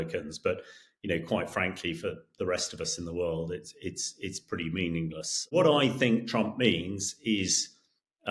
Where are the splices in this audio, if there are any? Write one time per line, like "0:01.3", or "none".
0:05.6